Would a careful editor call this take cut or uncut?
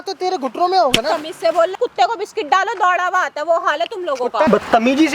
cut